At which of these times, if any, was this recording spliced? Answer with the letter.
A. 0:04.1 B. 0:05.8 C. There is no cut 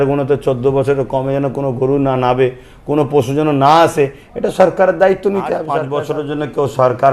B